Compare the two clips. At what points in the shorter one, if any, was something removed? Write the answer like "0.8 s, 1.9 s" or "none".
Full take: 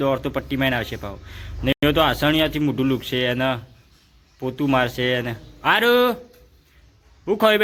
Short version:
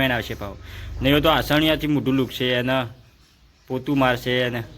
1.1 s